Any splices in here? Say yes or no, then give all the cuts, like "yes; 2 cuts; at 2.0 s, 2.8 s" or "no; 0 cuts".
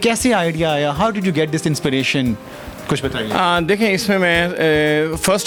no; 0 cuts